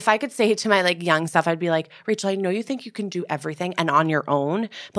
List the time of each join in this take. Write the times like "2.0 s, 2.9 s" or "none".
none

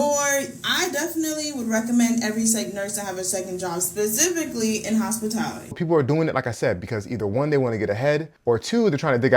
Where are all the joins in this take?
5.7 s

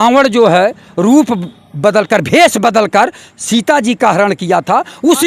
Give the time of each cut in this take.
none

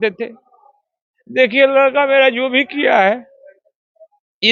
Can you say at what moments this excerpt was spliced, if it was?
none

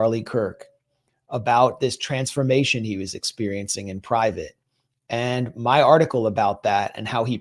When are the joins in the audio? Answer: none

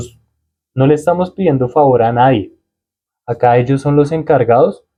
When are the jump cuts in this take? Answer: none

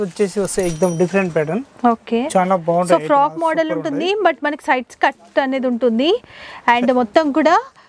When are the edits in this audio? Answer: none

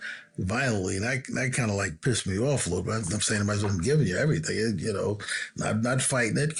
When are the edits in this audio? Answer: none

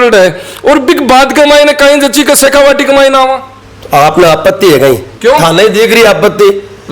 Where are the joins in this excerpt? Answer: 5.1 s

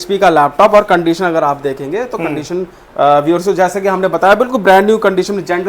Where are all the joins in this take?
none

